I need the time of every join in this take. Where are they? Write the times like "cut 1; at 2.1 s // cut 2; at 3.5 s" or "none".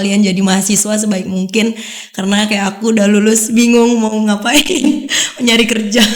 none